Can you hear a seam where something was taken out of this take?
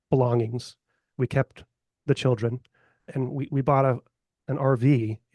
yes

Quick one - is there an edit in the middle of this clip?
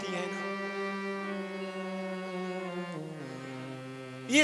no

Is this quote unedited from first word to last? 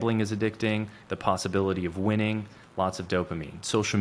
yes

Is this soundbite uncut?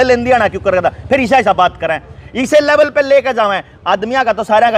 yes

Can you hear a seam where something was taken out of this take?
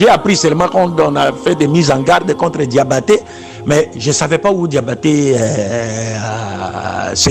no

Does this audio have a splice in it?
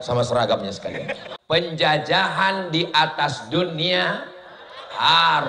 yes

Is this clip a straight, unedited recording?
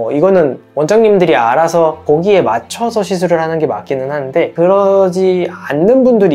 yes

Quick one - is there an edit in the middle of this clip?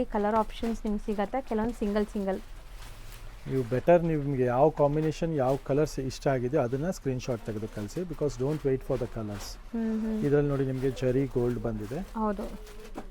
no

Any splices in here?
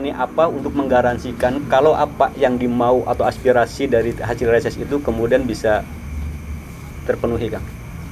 no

